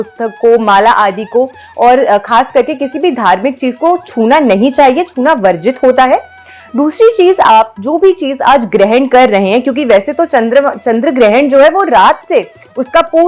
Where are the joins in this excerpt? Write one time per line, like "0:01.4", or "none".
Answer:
none